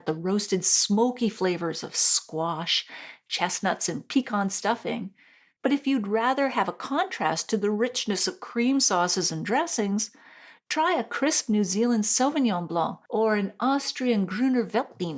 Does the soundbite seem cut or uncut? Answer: cut